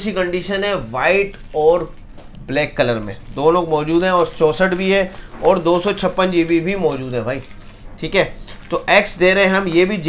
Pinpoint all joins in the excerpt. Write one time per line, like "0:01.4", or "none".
none